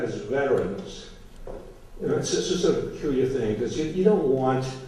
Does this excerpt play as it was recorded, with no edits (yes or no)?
yes